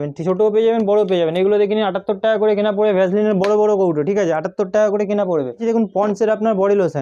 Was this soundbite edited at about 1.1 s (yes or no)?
no